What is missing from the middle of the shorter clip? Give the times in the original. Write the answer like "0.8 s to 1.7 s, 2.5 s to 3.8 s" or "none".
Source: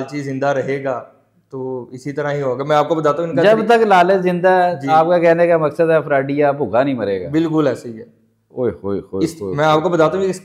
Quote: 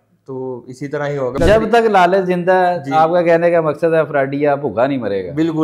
2.6 s to 3.3 s

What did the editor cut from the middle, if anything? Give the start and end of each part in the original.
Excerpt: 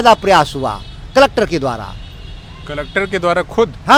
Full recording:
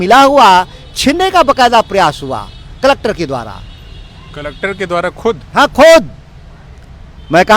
none

